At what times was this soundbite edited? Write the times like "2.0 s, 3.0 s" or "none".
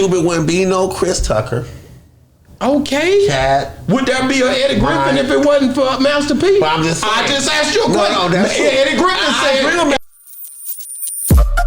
10.0 s